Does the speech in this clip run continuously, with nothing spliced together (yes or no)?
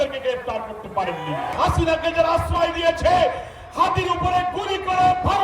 no